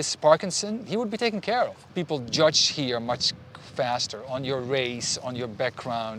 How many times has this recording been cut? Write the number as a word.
one